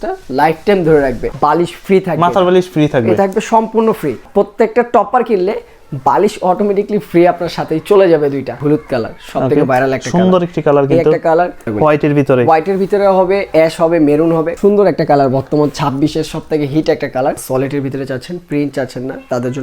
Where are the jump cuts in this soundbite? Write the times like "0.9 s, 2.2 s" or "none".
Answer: 1.3 s, 4.2 s, 8.6 s, 11.7 s, 14.5 s, 17.4 s